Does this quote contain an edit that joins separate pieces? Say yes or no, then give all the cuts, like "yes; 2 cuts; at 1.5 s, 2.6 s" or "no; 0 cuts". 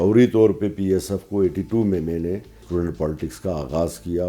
yes; 1 cut; at 2.6 s